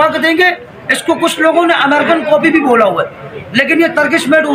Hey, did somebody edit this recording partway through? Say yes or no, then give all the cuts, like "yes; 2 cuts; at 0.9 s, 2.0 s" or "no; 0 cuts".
no; 0 cuts